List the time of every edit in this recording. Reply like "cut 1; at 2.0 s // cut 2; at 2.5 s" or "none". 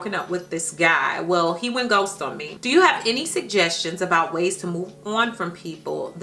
none